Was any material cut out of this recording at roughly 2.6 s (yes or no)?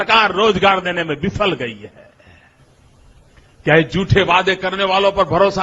yes